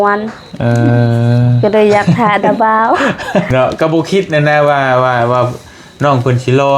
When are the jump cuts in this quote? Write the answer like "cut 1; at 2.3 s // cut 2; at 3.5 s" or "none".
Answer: cut 1; at 3.5 s